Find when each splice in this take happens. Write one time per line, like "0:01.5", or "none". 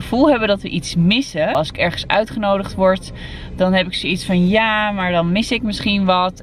none